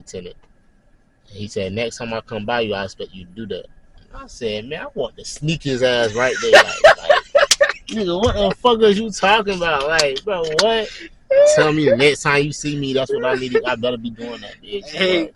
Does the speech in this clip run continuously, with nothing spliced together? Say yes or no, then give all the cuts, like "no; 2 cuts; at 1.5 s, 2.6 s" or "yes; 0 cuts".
yes; 0 cuts